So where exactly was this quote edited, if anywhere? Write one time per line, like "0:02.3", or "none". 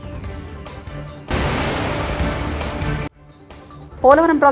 none